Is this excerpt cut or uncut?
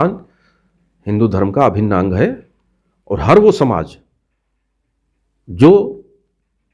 uncut